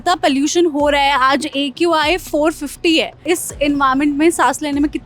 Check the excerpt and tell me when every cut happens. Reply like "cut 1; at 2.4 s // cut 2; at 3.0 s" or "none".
cut 1; at 3.2 s